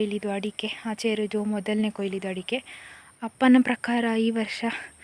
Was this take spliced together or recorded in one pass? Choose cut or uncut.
uncut